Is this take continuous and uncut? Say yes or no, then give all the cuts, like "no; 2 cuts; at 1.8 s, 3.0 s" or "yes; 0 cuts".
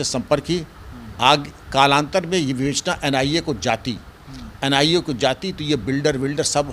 yes; 0 cuts